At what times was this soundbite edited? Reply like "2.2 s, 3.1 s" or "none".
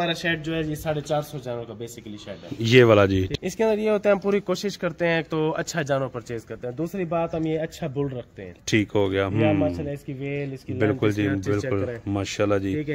3.3 s